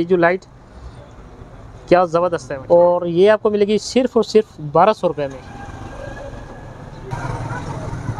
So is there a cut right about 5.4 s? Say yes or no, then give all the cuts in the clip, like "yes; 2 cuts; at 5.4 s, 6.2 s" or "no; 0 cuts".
yes; 2 cuts; at 2.5 s, 5.4 s